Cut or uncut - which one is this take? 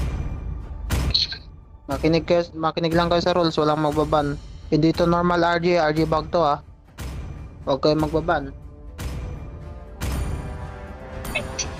uncut